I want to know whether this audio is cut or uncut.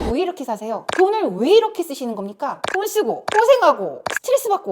uncut